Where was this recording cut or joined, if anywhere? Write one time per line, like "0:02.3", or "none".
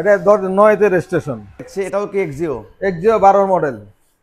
0:01.7